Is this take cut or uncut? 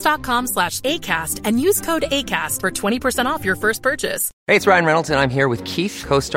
cut